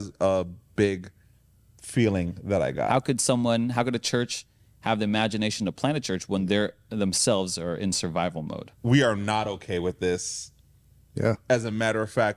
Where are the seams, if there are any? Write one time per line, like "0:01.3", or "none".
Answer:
0:02.9
0:08.6